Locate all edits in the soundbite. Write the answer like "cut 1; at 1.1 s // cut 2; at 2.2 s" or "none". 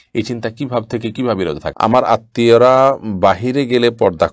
cut 1; at 1.7 s